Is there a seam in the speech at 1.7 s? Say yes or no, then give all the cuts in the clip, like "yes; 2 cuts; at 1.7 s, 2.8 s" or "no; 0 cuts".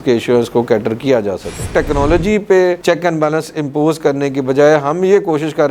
yes; 1 cut; at 1.7 s